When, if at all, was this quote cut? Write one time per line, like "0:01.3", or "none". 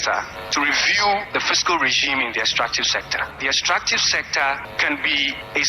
0:03.3